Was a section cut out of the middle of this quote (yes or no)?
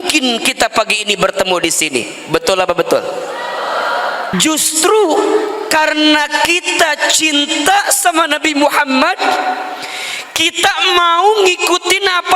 yes